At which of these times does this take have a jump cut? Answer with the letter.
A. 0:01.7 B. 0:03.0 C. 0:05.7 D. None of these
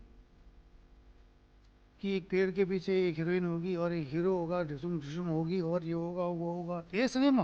D